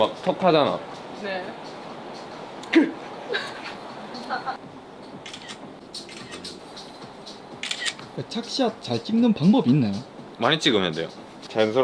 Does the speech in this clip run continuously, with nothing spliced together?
yes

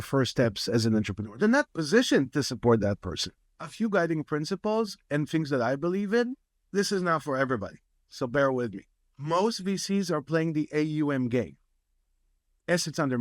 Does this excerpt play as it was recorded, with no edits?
no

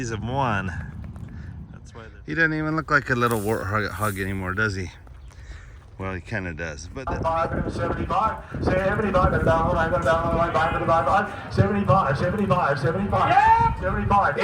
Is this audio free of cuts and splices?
no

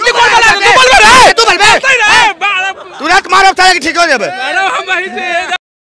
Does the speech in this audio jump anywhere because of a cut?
no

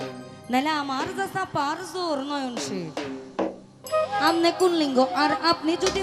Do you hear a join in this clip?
yes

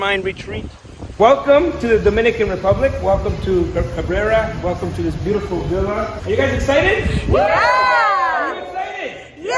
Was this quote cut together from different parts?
yes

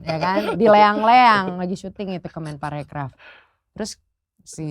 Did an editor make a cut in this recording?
no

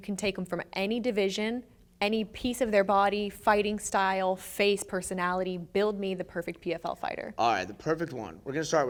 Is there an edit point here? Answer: no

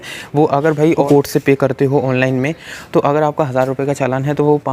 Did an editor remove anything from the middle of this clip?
yes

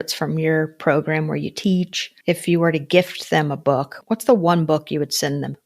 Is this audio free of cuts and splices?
no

